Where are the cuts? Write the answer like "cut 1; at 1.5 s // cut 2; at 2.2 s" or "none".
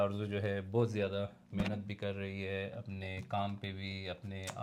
none